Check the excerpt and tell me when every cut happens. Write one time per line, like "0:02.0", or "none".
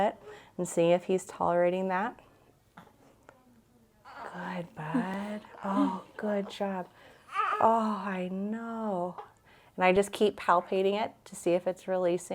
none